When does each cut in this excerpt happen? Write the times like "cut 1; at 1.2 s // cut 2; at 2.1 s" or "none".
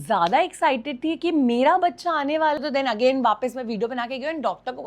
cut 1; at 2.6 s